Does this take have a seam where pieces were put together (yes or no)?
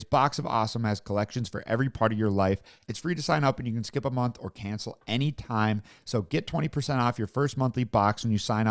yes